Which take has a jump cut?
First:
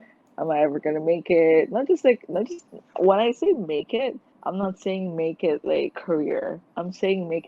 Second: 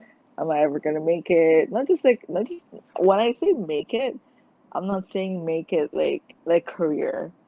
first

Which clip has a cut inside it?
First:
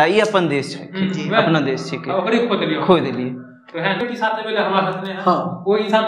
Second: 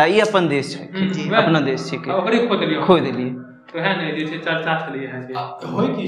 first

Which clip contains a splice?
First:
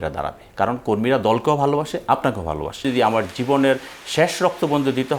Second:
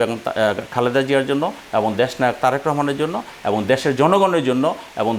first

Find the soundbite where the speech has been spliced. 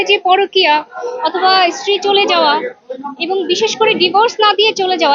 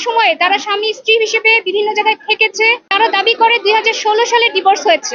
second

